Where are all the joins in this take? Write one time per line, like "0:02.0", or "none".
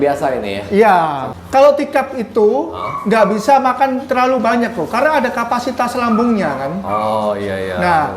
0:01.3